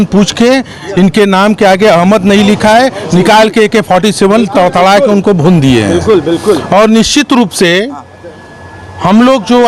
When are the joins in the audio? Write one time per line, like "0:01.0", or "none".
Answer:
none